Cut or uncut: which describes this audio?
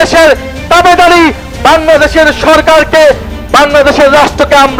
uncut